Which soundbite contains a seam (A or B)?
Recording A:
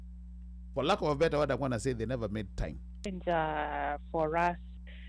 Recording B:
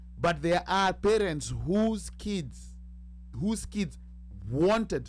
A